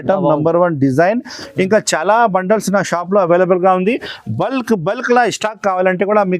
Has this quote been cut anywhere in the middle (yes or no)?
no